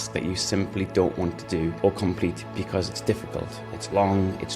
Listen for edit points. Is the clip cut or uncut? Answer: cut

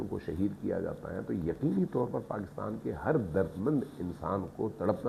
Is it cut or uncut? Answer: uncut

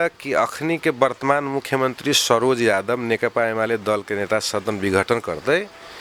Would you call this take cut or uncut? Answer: uncut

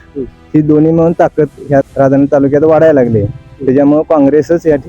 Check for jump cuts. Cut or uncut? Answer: cut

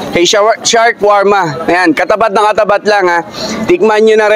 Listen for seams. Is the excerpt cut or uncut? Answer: uncut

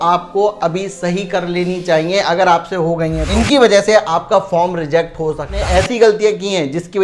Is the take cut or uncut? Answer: cut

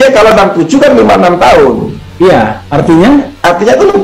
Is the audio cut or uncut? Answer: uncut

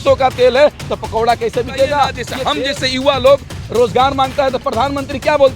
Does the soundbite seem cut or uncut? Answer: cut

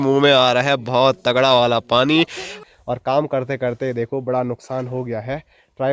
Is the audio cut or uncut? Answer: cut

